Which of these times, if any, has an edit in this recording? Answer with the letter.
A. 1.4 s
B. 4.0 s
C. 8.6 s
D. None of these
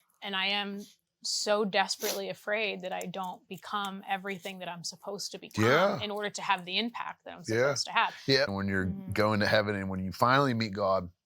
C